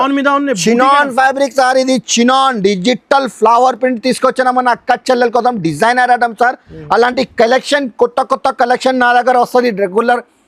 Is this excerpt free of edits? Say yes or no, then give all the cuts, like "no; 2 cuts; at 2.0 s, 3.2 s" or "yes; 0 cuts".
yes; 0 cuts